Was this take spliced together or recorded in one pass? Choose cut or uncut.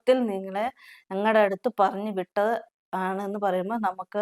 uncut